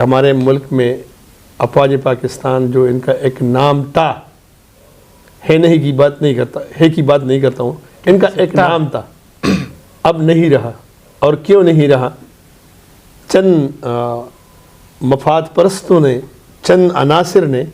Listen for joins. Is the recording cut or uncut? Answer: uncut